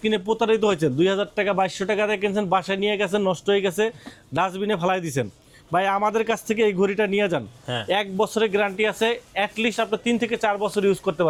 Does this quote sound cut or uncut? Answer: uncut